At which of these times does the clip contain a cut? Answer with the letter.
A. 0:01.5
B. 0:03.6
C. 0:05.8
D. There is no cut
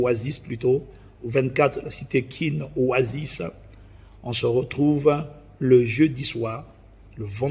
D